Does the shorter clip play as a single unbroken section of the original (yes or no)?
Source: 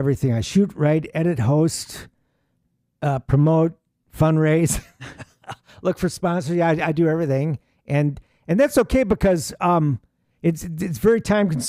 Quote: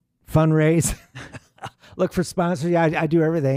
yes